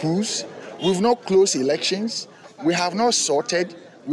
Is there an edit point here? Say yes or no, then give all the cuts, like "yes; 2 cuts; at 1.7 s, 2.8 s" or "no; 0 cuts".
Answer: no; 0 cuts